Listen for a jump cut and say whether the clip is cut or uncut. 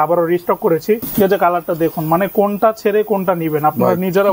cut